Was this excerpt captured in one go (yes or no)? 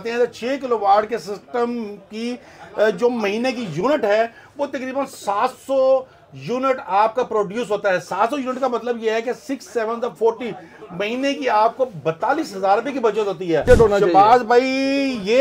no